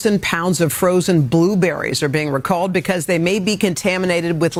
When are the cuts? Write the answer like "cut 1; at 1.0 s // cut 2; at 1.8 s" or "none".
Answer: none